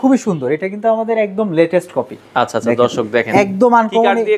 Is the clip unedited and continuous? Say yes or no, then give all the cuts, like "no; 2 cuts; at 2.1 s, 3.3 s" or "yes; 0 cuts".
yes; 0 cuts